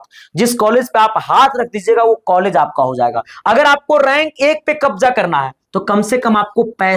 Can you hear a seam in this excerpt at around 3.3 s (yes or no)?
yes